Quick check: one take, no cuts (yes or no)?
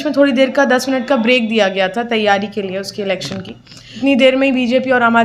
no